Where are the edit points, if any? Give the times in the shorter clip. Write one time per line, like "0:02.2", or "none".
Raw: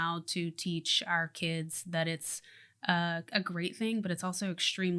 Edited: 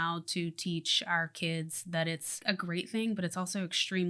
0:02.4